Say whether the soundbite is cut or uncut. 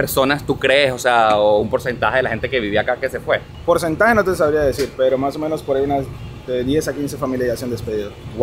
uncut